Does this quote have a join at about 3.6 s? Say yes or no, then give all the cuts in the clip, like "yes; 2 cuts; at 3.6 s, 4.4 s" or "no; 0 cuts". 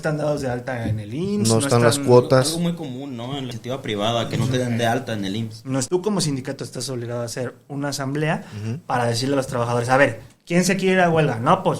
yes; 2 cuts; at 3.6 s, 5.9 s